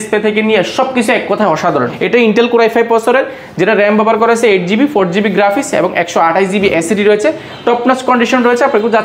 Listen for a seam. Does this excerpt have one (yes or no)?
yes